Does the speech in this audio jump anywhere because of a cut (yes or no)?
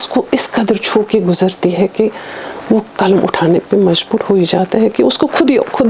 no